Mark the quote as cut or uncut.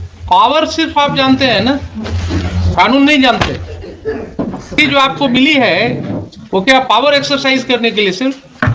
cut